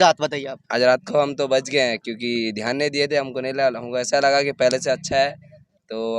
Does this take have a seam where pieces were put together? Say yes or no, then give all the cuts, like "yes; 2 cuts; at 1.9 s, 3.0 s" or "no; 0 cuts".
no; 0 cuts